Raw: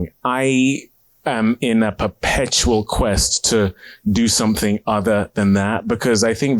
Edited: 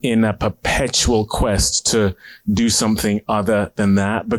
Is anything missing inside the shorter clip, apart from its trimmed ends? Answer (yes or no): no